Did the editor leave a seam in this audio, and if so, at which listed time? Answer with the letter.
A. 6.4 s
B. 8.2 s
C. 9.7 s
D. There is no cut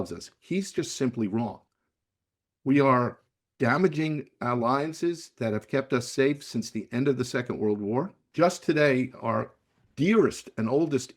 B